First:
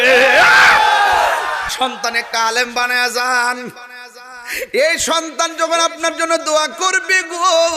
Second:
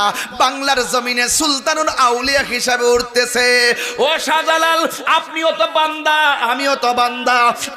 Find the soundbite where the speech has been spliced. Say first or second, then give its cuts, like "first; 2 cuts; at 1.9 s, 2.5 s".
first; 1 cut; at 1.7 s